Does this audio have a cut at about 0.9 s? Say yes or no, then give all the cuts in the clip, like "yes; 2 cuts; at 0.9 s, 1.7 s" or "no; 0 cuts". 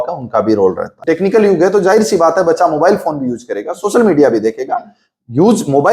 yes; 1 cut; at 0.9 s